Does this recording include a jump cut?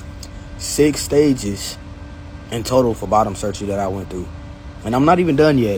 no; 0 cuts

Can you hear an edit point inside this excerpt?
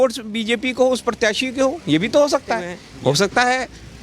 yes; 1 cut; at 2.9 s

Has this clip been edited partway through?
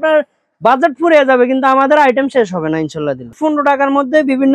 yes; 1 cut; at 3.3 s

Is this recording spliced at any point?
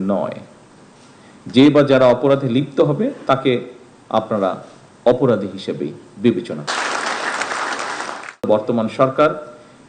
yes; 1 cut; at 8.5 s

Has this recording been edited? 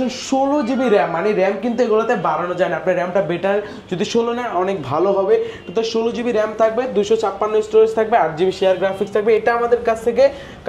no; 0 cuts

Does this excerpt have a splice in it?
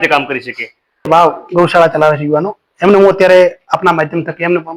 yes; 1 cut; at 1.1 s

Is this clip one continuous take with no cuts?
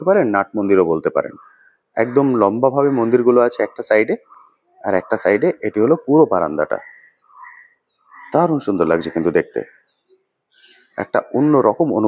yes; 0 cuts

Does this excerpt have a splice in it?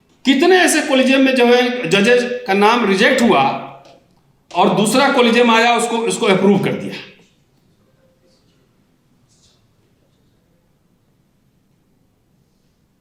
no; 0 cuts

